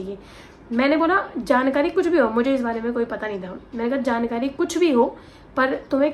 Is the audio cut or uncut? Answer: uncut